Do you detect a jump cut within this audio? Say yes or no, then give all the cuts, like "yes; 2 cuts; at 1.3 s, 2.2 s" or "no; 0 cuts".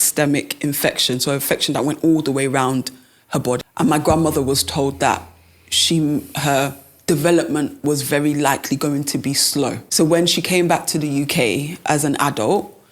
yes; 2 cuts; at 3.6 s, 9.8 s